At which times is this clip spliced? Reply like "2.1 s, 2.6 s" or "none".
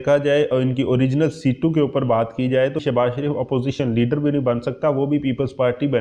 2.8 s